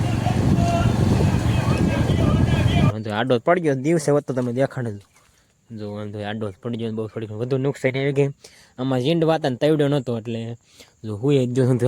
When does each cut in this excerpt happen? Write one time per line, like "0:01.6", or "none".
0:02.9

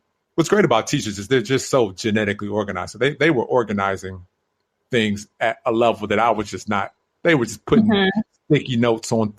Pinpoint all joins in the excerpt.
none

